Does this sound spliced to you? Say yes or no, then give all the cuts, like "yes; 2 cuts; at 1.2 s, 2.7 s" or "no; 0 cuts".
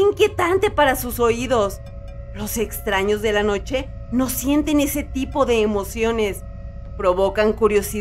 no; 0 cuts